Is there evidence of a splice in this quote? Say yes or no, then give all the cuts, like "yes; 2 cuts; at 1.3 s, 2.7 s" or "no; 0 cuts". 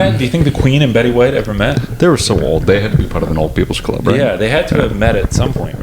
no; 0 cuts